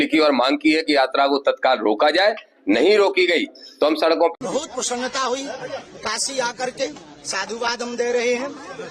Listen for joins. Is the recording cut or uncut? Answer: cut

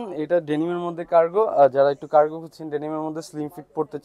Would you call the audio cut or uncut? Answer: uncut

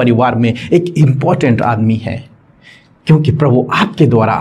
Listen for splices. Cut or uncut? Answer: uncut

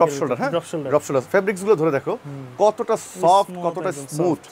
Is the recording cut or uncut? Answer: uncut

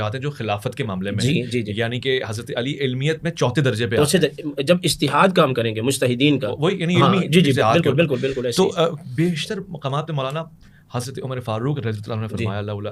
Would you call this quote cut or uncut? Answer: uncut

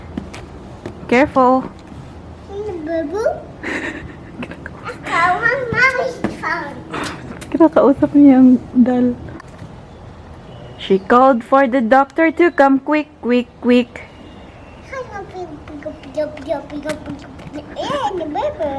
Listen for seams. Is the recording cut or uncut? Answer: cut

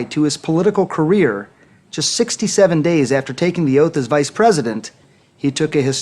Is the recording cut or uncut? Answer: cut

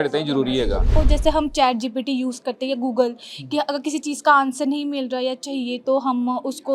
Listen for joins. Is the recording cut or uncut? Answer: cut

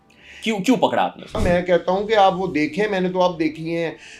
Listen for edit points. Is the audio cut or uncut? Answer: cut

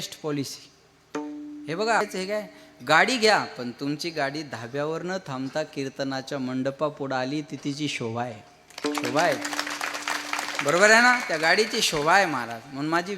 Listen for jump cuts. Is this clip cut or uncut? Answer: cut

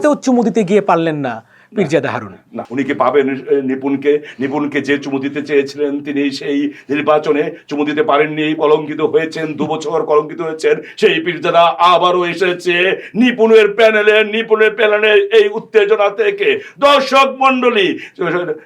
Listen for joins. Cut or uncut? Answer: cut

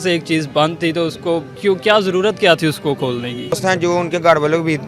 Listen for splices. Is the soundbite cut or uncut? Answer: cut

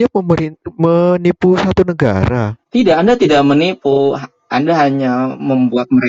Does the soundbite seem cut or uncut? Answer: uncut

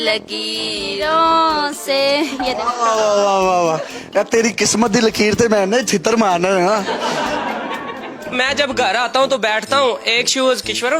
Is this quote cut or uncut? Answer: cut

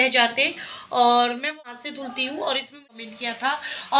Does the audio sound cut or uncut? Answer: cut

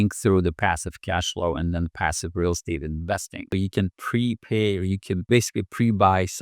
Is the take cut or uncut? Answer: cut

